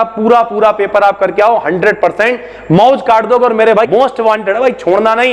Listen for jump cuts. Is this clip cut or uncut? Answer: cut